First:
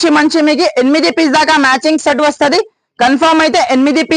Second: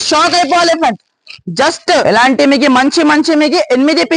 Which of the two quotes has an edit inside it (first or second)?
second